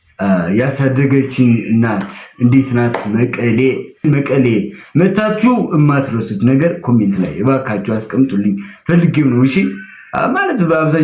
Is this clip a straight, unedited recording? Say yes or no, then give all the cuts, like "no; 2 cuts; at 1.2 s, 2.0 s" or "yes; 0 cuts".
no; 1 cut; at 4.0 s